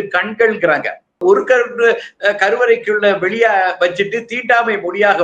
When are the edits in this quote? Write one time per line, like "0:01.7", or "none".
0:01.2